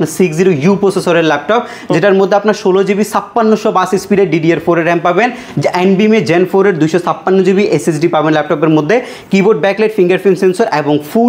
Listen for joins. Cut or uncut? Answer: uncut